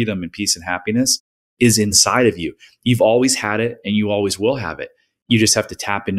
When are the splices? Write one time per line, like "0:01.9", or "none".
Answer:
0:02.0
0:05.2